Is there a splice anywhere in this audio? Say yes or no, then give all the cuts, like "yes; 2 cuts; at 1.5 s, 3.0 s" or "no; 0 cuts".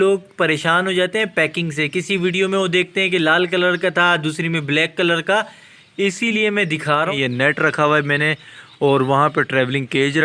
yes; 1 cut; at 7.1 s